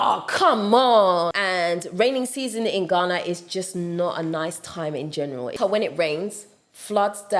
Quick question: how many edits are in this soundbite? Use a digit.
2